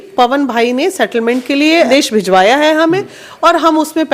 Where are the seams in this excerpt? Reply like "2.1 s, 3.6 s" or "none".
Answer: 1.9 s

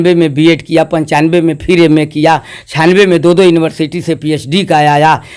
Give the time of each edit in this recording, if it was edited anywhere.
none

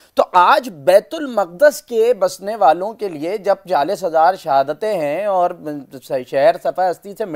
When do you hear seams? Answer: none

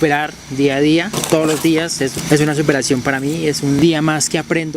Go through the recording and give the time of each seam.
1.2 s, 3.8 s

